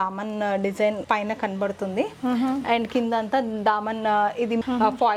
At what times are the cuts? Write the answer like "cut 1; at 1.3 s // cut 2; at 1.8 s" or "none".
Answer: none